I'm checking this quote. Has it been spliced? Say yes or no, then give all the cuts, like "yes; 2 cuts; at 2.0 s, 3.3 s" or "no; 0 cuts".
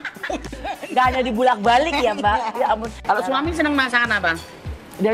yes; 1 cut; at 3.0 s